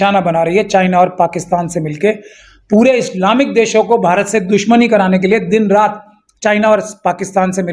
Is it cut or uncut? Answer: uncut